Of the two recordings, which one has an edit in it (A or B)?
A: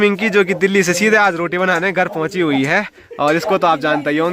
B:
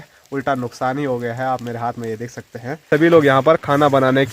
B